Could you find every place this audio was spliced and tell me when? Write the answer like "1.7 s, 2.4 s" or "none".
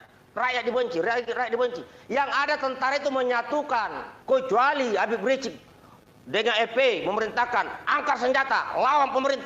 4.1 s